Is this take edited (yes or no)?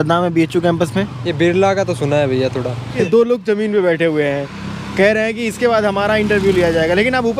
yes